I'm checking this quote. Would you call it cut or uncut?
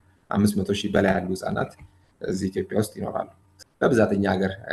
cut